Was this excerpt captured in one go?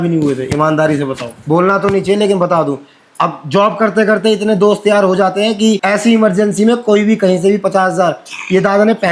yes; 0 cuts

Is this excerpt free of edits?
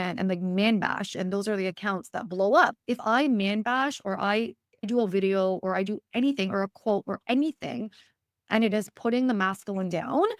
no; 2 cuts; at 2.8 s, 4.9 s

